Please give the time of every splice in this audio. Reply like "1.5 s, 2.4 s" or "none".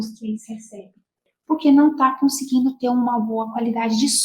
1.3 s